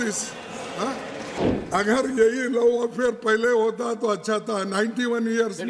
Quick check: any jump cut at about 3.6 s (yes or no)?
no